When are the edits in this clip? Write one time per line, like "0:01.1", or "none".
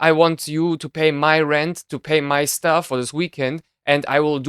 0:02.9